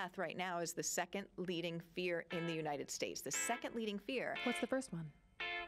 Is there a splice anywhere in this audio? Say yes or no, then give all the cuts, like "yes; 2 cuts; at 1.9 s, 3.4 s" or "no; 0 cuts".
no; 0 cuts